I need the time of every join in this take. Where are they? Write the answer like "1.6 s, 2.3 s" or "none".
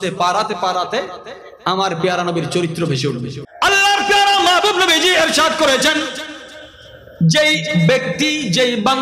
3.4 s

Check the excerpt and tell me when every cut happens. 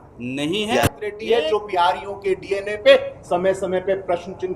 1.1 s

